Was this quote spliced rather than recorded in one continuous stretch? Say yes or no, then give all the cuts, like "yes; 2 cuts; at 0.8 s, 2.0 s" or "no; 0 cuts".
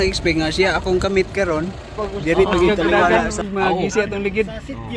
yes; 1 cut; at 3.0 s